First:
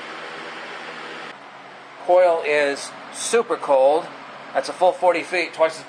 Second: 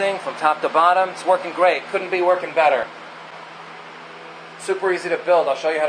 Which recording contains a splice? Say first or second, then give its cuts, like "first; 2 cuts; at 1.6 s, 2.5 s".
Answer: first; 1 cut; at 3.8 s